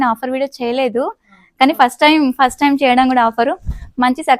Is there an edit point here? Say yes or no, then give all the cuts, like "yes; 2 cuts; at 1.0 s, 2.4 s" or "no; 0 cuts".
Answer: no; 0 cuts